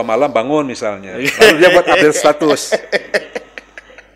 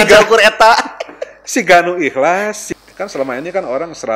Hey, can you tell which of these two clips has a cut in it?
second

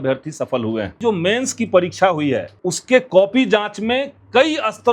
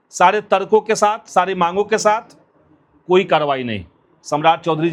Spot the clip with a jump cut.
first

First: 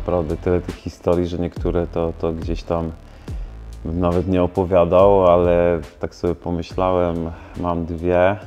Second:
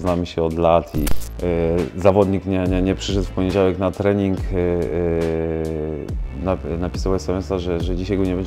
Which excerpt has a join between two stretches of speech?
second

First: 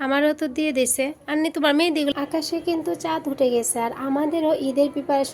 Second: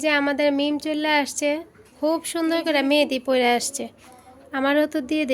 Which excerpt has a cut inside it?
first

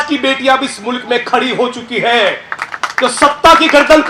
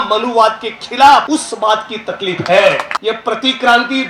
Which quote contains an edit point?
second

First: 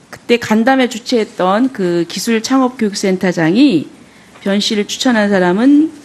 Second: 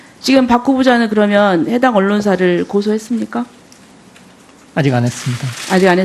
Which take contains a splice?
second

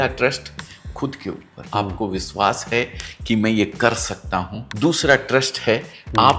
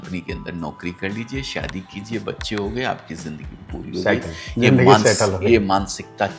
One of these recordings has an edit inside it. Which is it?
first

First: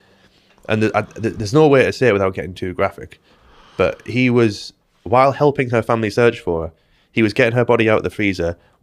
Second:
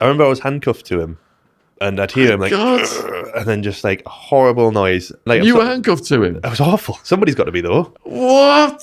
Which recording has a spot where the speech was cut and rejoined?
second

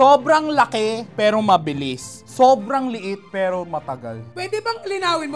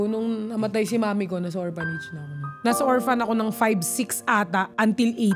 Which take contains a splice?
second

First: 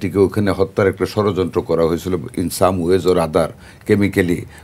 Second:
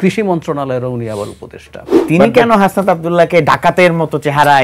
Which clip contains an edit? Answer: second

